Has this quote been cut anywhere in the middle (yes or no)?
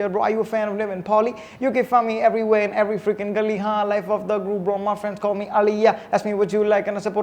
no